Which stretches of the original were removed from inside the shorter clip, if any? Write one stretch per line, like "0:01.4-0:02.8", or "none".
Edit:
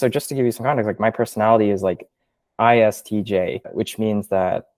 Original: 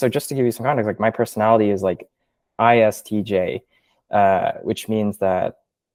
0:03.7-0:04.6